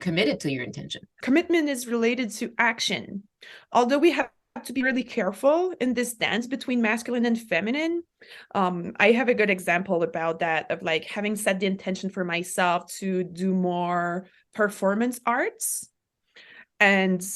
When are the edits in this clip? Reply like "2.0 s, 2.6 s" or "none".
1.1 s